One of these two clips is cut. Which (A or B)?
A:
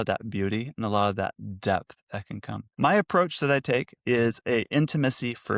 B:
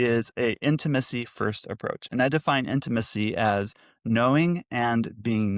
A